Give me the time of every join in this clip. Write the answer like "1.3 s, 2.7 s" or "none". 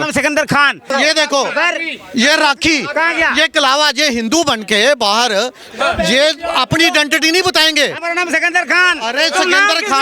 0.9 s, 5.6 s, 8.0 s

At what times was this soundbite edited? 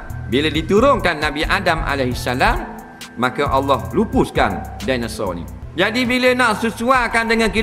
5.6 s

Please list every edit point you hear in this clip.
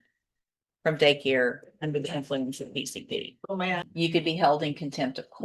3.8 s

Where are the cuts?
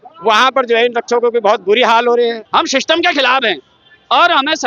2.4 s

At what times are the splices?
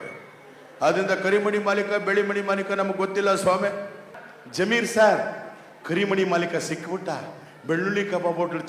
4.1 s

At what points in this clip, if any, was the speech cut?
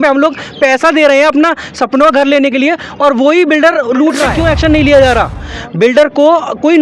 4.3 s

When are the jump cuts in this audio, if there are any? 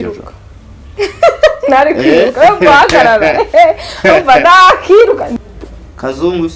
5.3 s

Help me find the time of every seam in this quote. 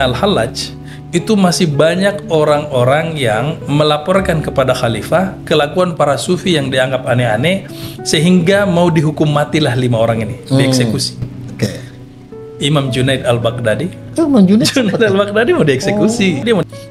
none

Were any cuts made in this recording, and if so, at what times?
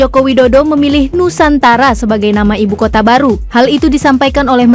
none

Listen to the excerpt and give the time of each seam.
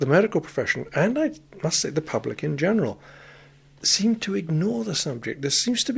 none

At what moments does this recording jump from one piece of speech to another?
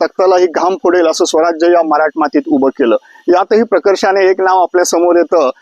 none

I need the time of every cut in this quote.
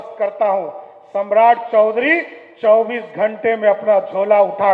none

